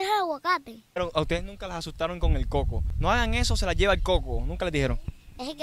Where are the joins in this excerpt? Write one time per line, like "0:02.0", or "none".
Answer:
0:01.0
0:02.8